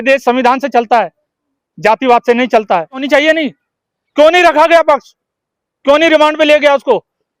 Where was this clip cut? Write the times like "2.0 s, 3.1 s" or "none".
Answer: 3.0 s